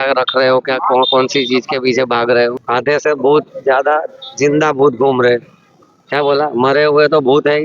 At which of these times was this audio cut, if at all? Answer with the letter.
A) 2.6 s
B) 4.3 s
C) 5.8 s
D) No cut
A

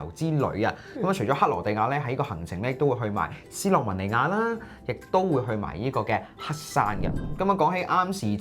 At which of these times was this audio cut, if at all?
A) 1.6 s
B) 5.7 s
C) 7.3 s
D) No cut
C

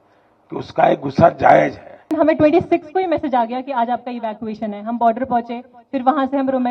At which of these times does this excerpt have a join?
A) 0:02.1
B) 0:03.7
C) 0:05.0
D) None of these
A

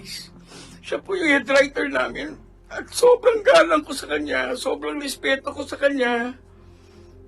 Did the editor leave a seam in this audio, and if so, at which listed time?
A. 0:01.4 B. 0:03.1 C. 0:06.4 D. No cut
C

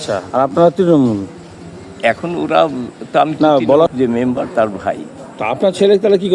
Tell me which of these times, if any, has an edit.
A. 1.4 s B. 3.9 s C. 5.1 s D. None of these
B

